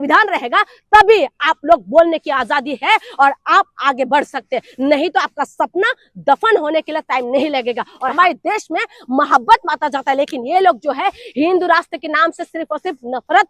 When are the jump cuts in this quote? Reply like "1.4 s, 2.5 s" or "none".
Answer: 8.1 s